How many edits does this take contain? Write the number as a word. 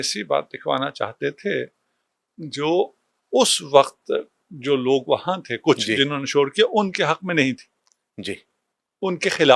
zero